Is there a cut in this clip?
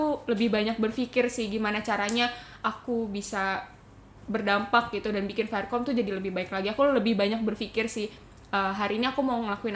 no; 0 cuts

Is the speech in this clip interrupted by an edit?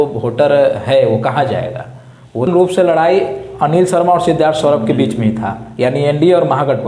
yes; 1 cut; at 2.5 s

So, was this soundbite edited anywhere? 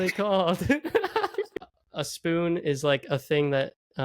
yes; 1 cut; at 1.6 s

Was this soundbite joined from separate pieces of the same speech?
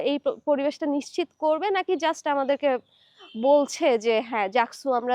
no; 0 cuts

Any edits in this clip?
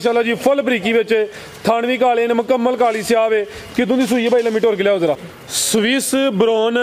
yes; 1 cut; at 5.3 s

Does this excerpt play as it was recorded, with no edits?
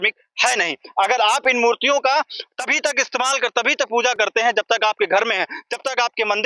yes; 0 cuts

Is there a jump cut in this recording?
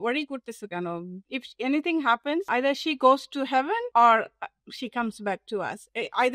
yes; 3 cuts; at 1.1 s, 2.5 s, 3.8 s

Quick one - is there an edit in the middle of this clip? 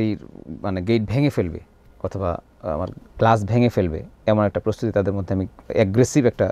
no; 0 cuts

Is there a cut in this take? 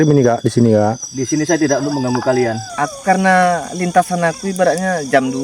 yes; 1 cut; at 2.6 s

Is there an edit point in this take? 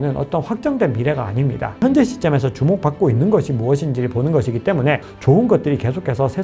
yes; 2 cuts; at 1.8 s, 5.1 s

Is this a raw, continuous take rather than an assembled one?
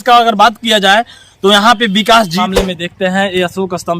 no; 1 cut; at 2.4 s

